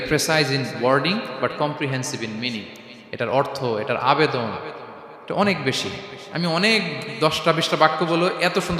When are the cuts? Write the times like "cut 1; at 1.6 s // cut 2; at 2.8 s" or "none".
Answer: none